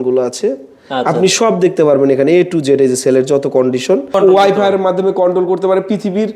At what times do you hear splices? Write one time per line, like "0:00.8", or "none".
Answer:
0:04.1